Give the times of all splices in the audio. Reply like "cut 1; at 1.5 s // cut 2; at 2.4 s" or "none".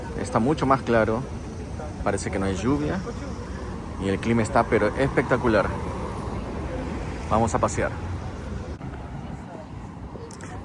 none